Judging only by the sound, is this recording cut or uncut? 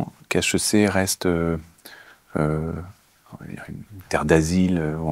uncut